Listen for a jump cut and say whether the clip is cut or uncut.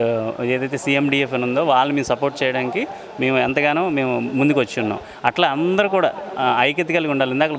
uncut